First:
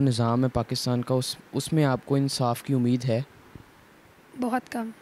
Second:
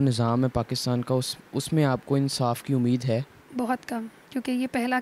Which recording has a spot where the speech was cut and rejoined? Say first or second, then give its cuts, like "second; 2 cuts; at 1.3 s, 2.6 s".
second; 2 cuts; at 3.4 s, 4.2 s